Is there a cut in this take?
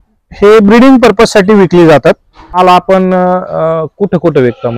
yes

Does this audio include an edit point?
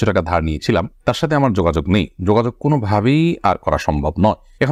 no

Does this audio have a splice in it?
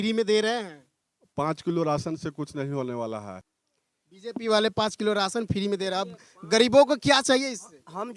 yes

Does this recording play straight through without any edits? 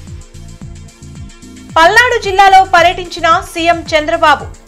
yes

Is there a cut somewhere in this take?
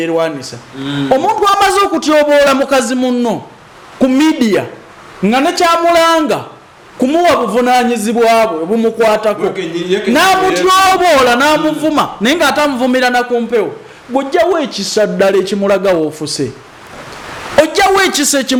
no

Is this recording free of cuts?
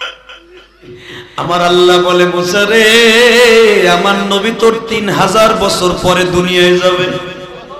no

